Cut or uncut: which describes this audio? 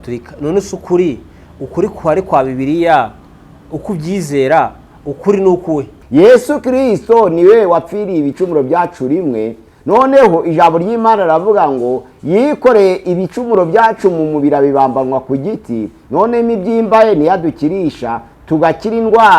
cut